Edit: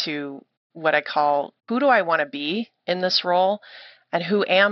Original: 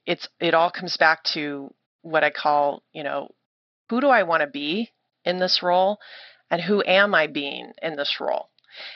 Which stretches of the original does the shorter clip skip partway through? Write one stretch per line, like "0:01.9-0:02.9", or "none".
0:02.9-0:03.8
0:05.0-0:05.1

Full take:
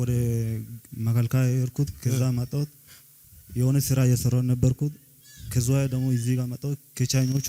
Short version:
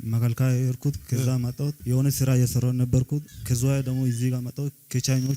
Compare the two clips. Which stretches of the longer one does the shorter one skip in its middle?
0:02.7-0:03.5
0:05.1-0:05.4

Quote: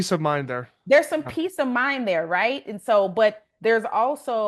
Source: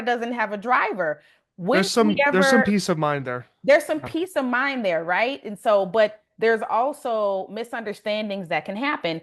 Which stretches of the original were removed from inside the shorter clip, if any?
none

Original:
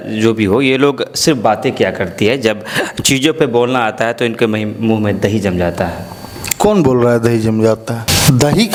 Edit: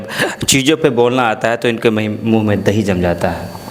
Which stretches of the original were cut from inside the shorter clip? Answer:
none

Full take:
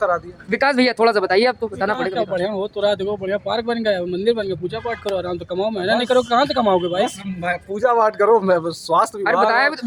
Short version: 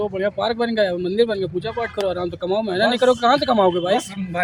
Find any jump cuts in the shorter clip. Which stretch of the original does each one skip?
none

